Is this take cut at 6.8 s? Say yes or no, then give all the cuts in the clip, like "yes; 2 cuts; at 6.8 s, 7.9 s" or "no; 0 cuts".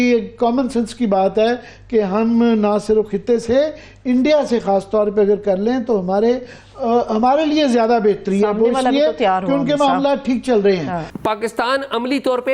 no; 1 cut; at 11.1 s